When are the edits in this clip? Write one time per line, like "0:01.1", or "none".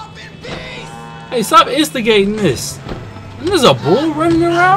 none